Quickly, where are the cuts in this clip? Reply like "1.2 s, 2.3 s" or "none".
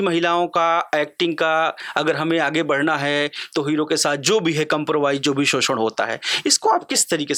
none